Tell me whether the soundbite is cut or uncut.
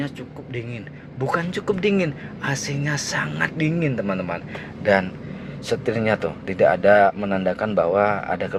uncut